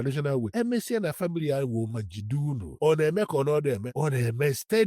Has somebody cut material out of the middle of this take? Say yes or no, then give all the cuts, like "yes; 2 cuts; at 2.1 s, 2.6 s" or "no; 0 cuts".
yes; 1 cut; at 3.9 s